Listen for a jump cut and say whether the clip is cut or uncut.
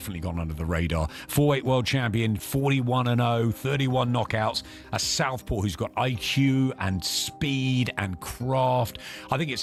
uncut